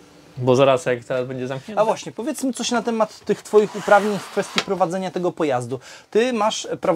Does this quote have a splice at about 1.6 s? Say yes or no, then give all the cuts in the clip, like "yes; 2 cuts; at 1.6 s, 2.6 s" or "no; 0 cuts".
yes; 1 cut; at 1.6 s